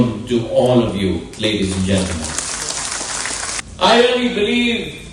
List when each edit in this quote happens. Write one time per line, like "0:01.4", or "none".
0:03.6